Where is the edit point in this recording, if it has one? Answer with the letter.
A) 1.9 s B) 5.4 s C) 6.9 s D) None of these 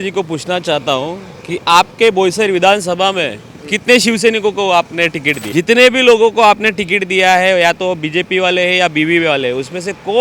B